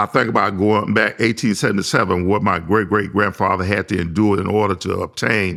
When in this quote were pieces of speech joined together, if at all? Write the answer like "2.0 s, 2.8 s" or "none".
none